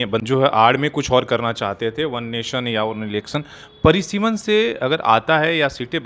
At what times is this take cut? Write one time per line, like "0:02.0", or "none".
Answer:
none